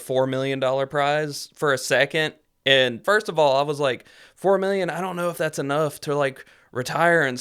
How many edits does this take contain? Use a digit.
1